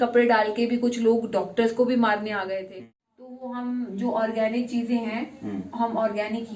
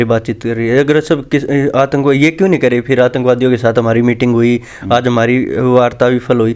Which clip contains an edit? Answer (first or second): first